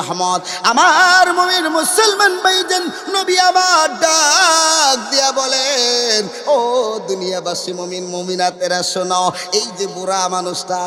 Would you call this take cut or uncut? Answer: uncut